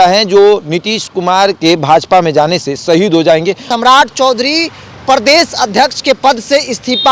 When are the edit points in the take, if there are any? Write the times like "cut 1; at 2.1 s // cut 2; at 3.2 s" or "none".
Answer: cut 1; at 1.6 s // cut 2; at 3.6 s